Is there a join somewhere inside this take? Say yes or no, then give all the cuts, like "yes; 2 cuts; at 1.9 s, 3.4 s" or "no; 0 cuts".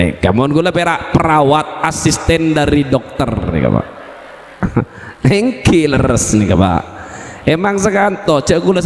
no; 0 cuts